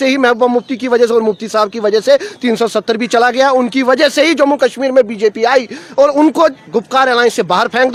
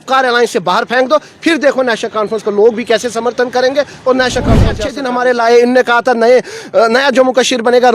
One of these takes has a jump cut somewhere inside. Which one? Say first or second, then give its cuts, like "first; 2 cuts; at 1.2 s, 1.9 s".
second; 1 cut; at 4.9 s